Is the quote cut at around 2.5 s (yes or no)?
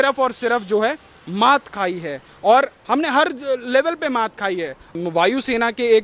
no